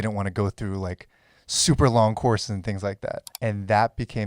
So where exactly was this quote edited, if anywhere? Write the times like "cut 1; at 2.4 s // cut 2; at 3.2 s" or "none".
cut 1; at 3.3 s